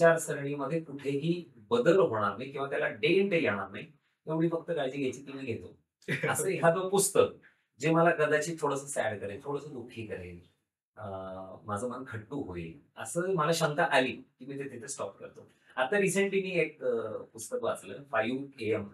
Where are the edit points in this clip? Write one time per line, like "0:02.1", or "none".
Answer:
none